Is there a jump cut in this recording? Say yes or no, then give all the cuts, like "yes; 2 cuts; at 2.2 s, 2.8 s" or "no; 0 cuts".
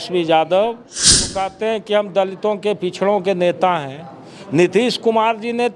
yes; 1 cut; at 1.2 s